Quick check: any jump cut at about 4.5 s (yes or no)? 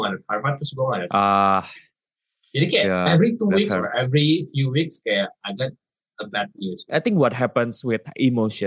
no